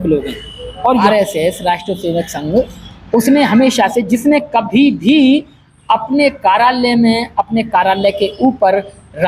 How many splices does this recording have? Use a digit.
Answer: 1